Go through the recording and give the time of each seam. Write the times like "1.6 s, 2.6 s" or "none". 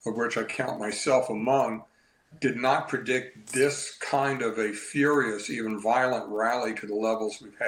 none